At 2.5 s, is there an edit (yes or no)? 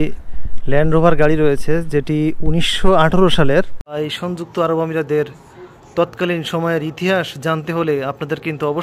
no